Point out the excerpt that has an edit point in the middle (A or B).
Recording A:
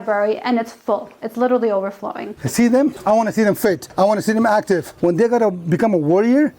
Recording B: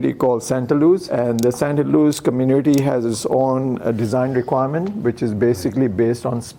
A